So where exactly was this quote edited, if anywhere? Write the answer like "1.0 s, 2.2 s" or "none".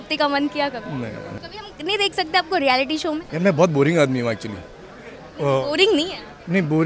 1.4 s, 3.3 s